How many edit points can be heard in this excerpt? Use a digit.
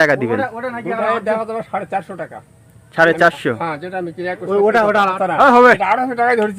1